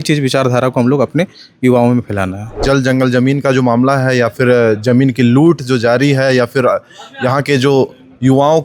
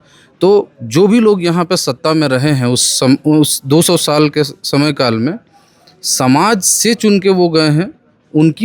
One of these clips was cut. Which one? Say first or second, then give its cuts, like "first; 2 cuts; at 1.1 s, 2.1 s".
first; 1 cut; at 2.6 s